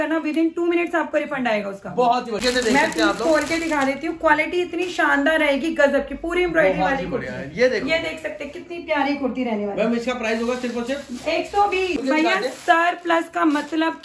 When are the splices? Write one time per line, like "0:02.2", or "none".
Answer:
0:02.4
0:12.0